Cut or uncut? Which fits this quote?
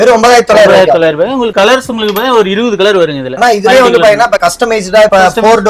uncut